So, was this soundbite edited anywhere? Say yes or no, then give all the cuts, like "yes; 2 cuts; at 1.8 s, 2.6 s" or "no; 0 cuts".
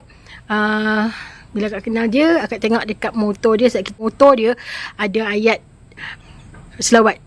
yes; 2 cuts; at 3.9 s, 6.1 s